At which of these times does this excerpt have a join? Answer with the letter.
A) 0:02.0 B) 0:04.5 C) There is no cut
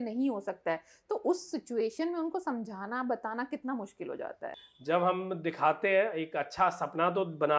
B